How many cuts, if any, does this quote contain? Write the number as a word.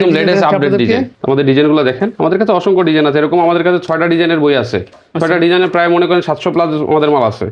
one